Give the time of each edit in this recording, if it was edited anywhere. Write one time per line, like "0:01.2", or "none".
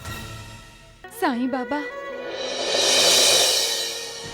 0:01.0